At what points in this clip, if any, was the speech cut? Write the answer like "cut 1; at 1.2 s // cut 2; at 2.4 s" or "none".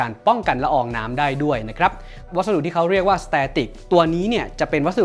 cut 1; at 2.2 s